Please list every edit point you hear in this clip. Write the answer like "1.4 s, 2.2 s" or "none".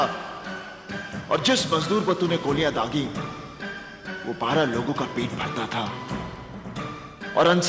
none